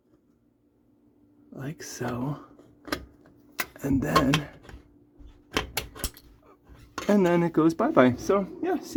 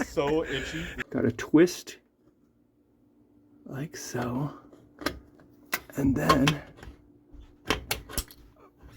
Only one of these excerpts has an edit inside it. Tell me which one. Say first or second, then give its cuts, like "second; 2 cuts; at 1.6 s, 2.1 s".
second; 1 cut; at 0.9 s